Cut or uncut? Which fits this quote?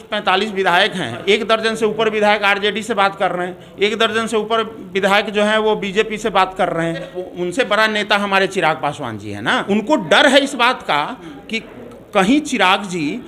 cut